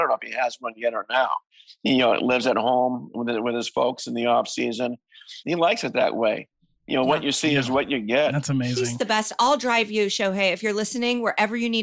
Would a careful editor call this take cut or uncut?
cut